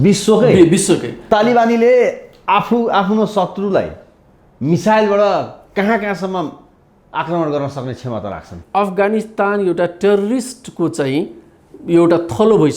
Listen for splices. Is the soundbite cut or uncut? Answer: cut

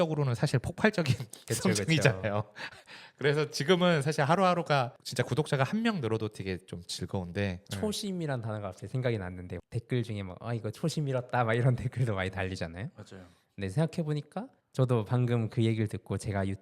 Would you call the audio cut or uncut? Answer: cut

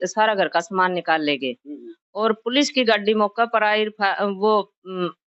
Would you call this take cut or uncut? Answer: uncut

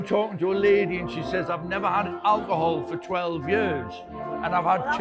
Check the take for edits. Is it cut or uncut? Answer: uncut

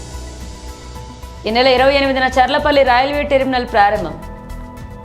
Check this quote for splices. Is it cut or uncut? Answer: cut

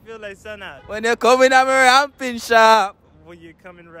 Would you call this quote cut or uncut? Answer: uncut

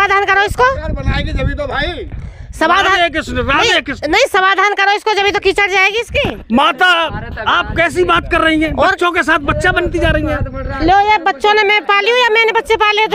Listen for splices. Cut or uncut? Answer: uncut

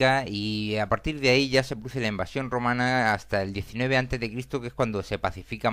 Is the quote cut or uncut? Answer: cut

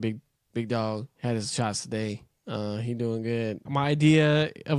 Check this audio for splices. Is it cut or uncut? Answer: cut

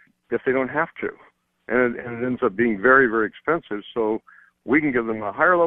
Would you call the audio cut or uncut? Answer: uncut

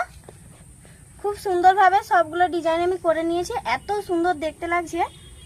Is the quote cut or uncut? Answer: uncut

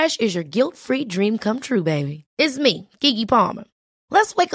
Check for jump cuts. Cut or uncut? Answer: uncut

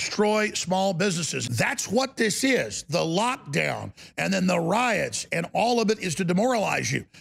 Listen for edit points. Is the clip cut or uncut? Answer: cut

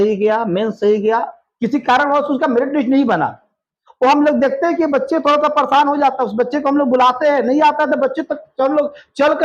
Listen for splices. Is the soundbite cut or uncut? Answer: uncut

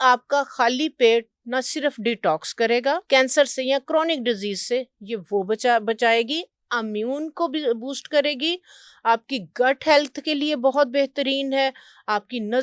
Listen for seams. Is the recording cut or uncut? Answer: cut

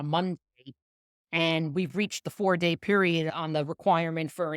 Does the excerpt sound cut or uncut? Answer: cut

